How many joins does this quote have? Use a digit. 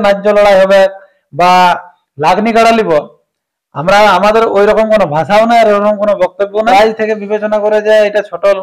1